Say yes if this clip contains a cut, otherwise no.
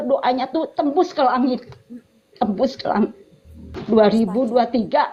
no